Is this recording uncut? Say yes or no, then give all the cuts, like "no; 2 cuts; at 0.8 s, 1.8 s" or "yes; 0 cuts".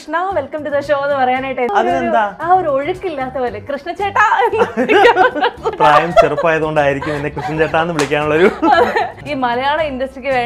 no; 3 cuts; at 1.7 s, 5.7 s, 9.2 s